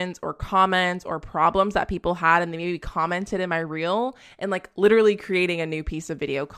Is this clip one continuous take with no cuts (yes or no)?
yes